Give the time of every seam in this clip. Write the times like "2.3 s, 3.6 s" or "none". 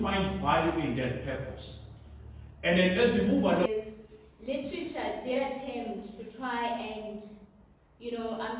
3.7 s

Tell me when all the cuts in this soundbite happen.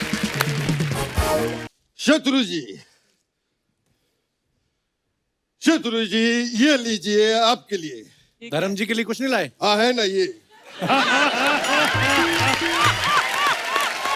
1.8 s

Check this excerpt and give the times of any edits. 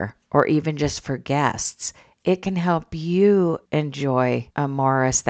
3.6 s, 4.5 s

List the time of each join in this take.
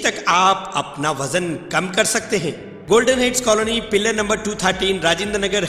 2.7 s

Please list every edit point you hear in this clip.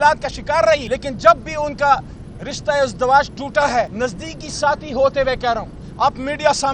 0.8 s, 3.9 s

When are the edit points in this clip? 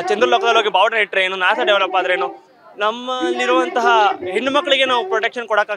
none

